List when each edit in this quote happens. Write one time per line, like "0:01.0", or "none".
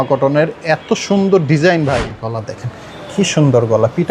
0:02.1

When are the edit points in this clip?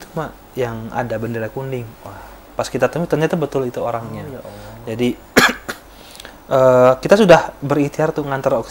none

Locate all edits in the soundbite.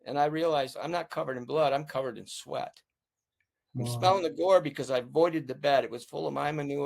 none

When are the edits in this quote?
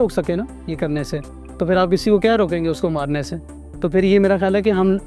none

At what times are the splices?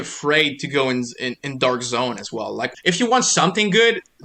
0:02.7

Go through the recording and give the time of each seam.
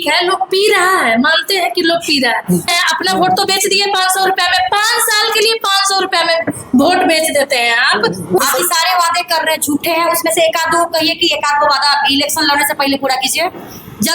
0:02.7
0:08.4

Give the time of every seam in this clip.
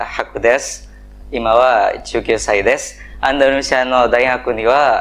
none

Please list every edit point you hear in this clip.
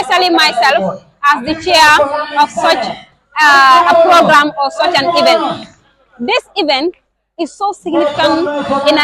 none

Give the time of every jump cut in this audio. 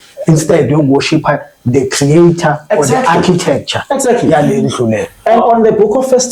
0:05.4

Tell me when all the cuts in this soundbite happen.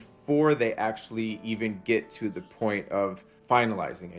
0:03.3

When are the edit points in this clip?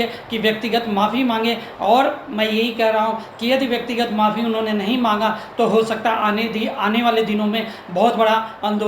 none

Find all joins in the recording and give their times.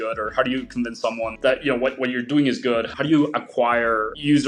none

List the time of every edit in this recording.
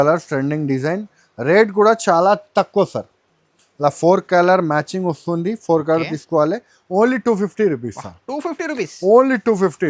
none

